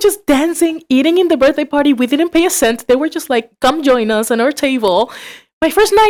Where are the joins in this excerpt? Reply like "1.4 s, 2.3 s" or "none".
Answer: none